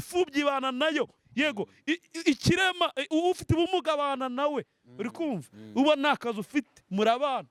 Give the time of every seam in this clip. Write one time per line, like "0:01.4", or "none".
none